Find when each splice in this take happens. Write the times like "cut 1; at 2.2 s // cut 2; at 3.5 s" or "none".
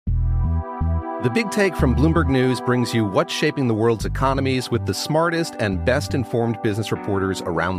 cut 1; at 1.0 s